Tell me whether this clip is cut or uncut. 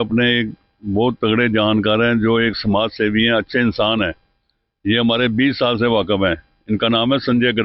uncut